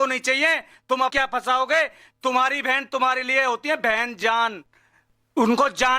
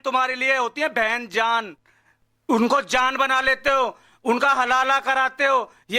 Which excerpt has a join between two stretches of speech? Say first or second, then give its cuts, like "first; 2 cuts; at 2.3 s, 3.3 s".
first; 1 cut; at 1.1 s